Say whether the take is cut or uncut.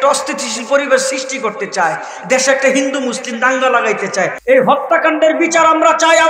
cut